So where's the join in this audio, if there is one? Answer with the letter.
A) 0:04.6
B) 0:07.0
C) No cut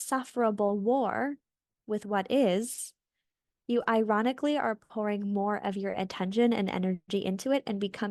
C